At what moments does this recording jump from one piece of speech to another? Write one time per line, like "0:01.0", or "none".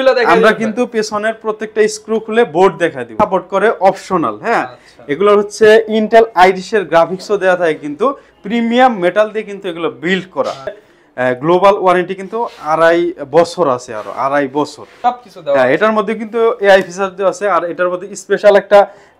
0:03.0
0:10.9
0:14.8